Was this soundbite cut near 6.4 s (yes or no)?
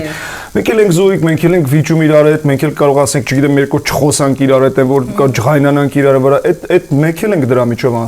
no